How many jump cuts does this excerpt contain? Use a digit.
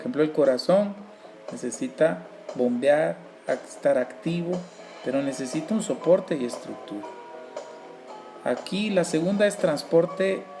1